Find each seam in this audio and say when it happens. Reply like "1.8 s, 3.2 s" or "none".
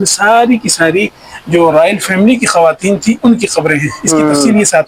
none